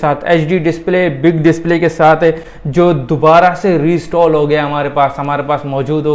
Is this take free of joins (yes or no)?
yes